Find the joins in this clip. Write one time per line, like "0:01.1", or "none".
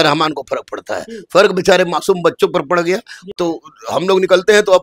0:03.3